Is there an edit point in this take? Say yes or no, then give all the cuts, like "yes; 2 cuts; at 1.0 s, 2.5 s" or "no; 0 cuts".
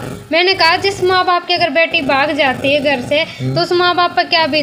no; 0 cuts